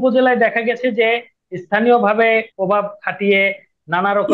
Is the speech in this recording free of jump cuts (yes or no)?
no